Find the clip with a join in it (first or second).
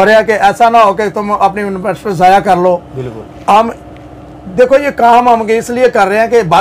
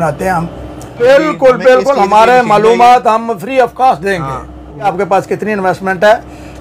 second